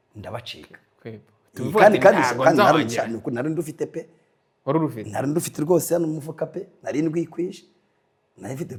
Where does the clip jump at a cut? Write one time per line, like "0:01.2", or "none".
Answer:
none

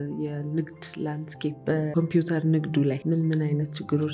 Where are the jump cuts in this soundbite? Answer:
0:01.7
0:03.0

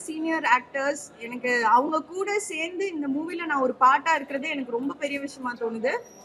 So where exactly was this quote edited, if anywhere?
none

